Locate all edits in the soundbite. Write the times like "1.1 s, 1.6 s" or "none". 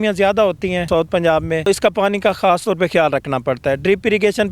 0.8 s, 1.7 s